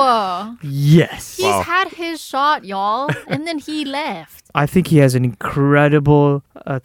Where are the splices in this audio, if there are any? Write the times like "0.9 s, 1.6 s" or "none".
3.2 s, 4.4 s